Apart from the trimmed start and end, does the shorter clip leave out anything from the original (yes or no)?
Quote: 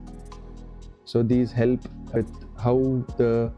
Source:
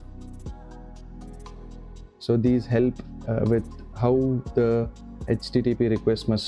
yes